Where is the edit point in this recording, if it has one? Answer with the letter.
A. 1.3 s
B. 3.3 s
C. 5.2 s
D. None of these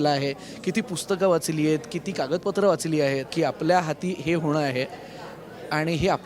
B